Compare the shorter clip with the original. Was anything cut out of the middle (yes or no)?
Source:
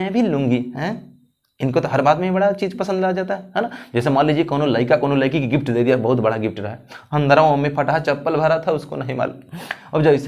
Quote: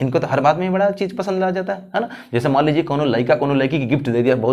no